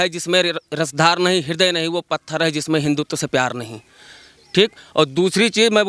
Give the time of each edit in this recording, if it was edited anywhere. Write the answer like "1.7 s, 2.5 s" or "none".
none